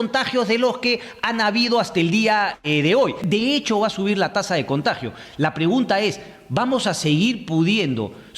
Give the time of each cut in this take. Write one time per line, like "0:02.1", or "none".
0:03.2

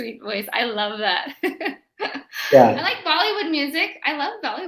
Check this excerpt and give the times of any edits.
0:03.0

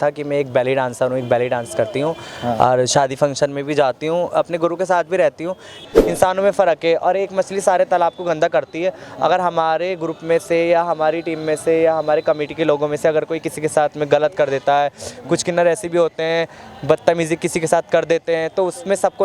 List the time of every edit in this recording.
0:05.8

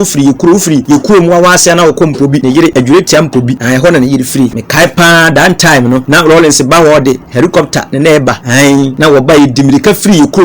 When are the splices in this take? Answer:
0:00.8
0:02.5
0:03.6
0:04.6
0:06.0
0:08.8

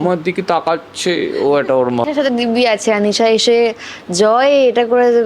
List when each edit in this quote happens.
0:02.1

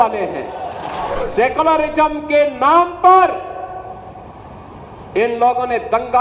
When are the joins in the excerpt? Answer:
0:01.2

